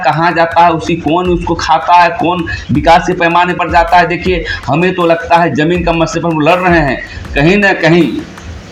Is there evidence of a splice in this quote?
no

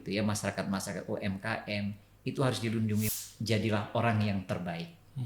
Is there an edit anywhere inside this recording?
yes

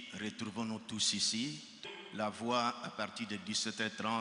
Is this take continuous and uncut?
no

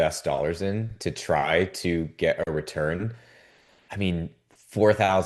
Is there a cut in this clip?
no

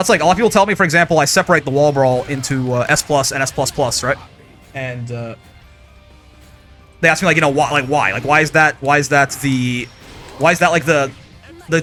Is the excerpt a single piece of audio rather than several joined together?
yes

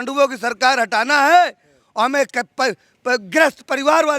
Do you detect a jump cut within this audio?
no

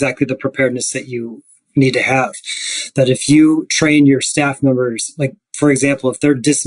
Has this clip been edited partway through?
yes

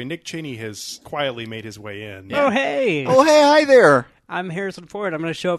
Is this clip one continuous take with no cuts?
no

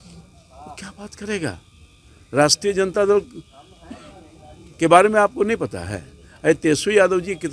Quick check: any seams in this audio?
no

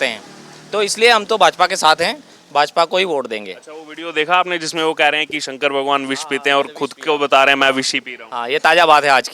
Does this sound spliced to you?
no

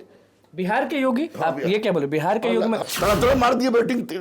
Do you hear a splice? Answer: yes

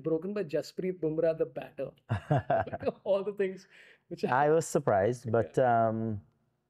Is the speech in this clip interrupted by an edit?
no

